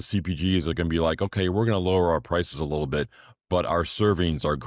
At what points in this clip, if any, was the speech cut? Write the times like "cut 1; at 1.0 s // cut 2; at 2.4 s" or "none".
none